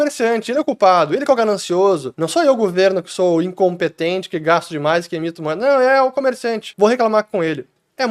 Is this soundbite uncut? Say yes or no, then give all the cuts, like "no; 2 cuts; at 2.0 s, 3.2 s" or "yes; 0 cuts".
no; 2 cuts; at 2.1 s, 6.6 s